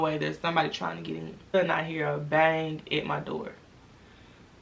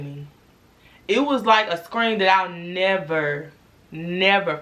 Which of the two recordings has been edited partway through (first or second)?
first